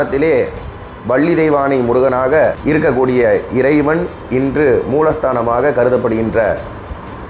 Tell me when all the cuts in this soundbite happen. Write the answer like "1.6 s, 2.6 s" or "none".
2.6 s